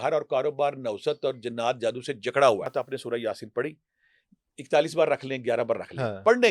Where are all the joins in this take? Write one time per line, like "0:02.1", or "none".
0:02.7